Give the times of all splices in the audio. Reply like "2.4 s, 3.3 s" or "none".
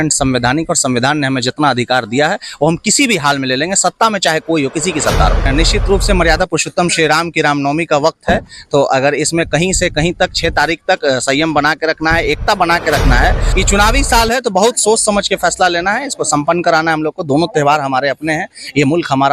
5.4 s, 13.5 s